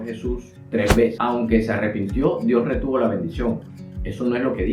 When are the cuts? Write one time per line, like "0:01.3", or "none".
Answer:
0:01.2